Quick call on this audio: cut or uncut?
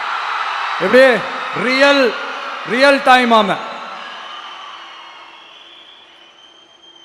uncut